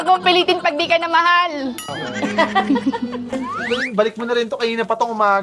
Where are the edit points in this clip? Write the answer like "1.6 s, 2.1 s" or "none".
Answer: 1.9 s, 3.5 s